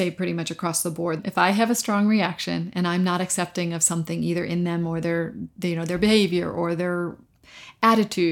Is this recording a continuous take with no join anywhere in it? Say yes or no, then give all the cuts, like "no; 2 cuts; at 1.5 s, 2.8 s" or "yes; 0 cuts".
no; 1 cut; at 1.3 s